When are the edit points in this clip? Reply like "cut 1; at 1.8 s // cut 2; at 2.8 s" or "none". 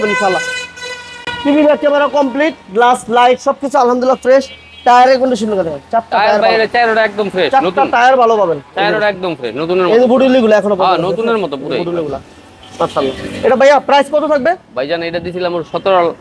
none